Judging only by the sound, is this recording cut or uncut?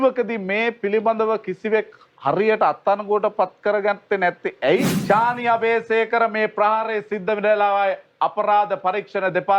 cut